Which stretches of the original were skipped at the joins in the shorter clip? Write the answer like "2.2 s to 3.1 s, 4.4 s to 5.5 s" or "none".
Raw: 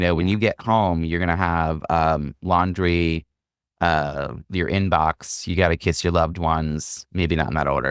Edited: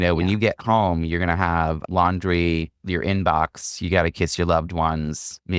1.8 s to 2.3 s, 3.3 s to 4.4 s